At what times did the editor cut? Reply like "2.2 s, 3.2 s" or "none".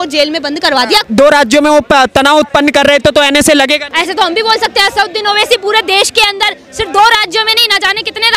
1.1 s, 3.9 s

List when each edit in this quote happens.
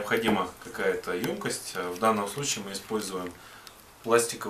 1.5 s

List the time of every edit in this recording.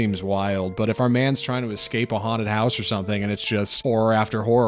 3.7 s

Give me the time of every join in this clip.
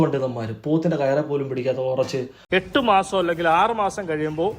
2.4 s

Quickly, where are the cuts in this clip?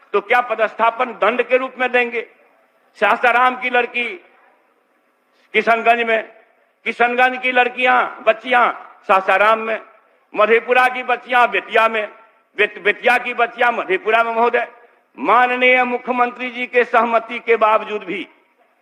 none

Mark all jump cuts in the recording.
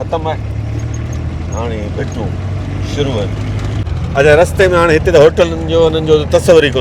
3.8 s

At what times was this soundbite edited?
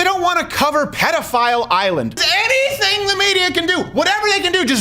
2.2 s

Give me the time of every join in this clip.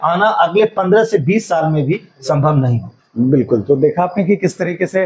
none

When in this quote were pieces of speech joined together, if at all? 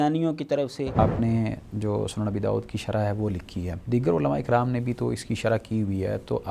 1.0 s, 3.8 s

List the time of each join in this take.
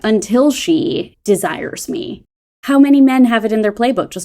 1.1 s, 2.3 s

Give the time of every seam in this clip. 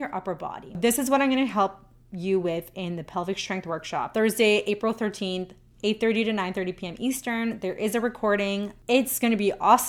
0.8 s, 4.1 s, 8.7 s

